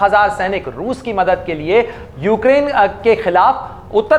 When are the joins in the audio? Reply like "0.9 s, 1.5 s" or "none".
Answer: none